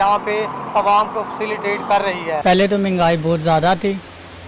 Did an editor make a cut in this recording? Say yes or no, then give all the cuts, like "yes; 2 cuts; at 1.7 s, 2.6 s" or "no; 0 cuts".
yes; 1 cut; at 2.4 s